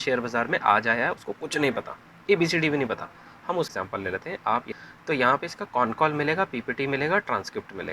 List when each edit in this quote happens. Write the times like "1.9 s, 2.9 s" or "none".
3.7 s, 4.7 s